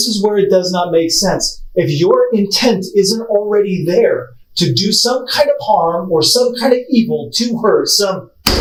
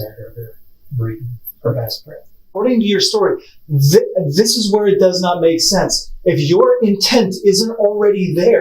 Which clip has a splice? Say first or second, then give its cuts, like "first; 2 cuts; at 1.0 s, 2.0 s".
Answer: second; 2 cuts; at 1.4 s, 2.5 s